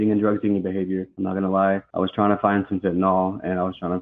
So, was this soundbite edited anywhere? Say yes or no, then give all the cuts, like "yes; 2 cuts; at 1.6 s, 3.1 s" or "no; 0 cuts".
yes; 2 cuts; at 1.1 s, 1.9 s